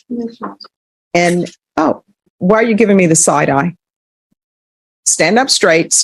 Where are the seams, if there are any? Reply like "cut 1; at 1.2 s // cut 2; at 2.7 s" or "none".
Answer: none

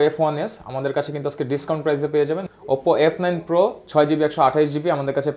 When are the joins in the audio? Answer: cut 1; at 2.5 s

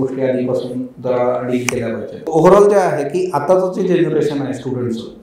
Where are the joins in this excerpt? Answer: cut 1; at 2.3 s

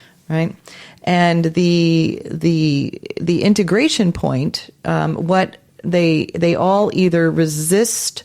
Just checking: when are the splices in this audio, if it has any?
none

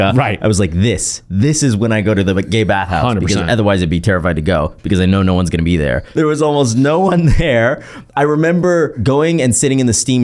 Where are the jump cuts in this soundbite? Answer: cut 1; at 6.0 s // cut 2; at 9.0 s

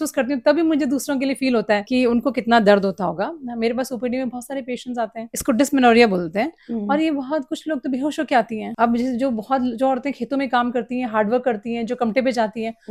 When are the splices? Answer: none

